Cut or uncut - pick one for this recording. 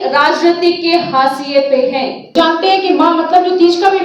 cut